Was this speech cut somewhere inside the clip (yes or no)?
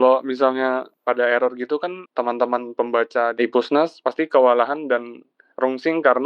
yes